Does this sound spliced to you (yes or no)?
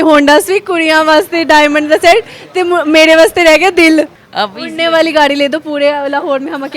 yes